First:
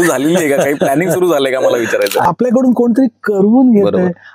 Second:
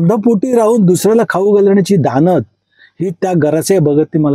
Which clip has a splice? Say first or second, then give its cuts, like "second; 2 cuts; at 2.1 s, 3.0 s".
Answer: first; 1 cut; at 2.2 s